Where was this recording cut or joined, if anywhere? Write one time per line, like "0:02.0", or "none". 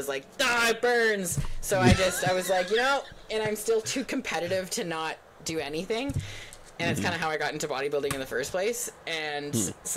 none